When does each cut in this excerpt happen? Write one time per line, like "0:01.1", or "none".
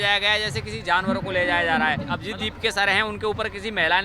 0:02.2